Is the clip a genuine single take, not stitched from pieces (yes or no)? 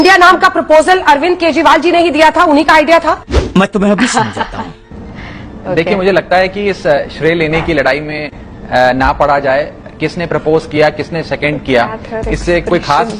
yes